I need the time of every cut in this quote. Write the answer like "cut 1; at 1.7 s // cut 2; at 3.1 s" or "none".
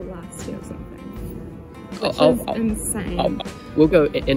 cut 1; at 3.4 s

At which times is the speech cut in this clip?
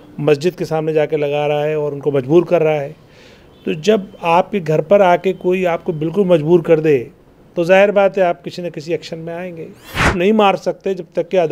cut 1; at 10.1 s

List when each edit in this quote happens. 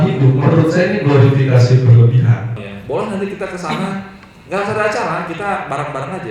none

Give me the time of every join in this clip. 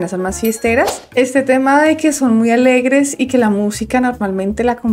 cut 1; at 1.0 s

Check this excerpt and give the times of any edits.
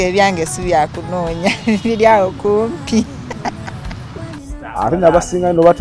cut 1; at 4.5 s

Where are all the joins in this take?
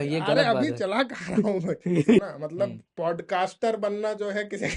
cut 1; at 2.2 s

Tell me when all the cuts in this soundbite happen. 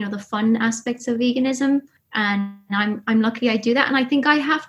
cut 1; at 2.0 s

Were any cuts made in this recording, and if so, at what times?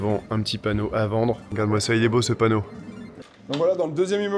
cut 1; at 1.5 s // cut 2; at 3.0 s

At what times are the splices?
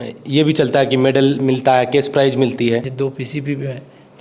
cut 1; at 2.9 s

